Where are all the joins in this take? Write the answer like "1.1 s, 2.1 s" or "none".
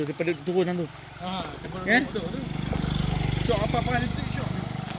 none